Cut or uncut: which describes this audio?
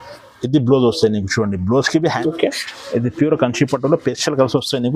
cut